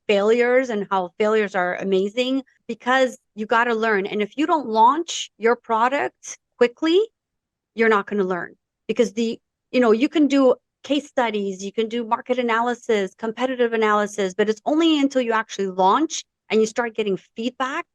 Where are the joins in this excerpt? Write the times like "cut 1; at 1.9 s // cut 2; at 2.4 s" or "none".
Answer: cut 1; at 2.6 s // cut 2; at 3.3 s